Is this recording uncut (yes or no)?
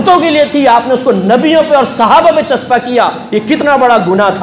yes